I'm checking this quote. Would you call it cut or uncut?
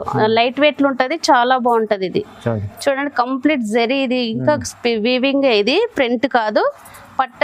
uncut